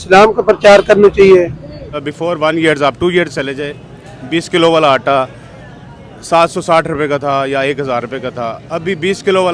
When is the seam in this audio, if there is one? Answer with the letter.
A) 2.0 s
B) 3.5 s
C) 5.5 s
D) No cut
A